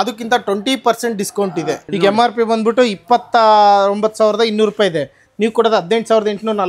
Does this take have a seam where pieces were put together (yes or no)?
yes